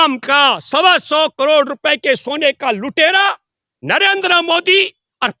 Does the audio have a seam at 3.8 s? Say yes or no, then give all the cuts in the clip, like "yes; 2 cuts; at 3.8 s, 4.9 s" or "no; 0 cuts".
no; 0 cuts